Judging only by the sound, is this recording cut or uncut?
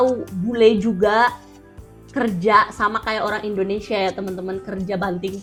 uncut